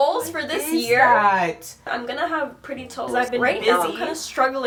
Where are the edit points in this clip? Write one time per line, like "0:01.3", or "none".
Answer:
none